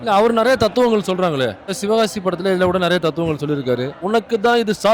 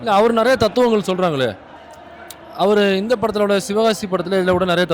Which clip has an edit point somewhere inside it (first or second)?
first